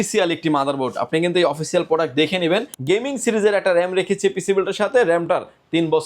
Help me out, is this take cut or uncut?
cut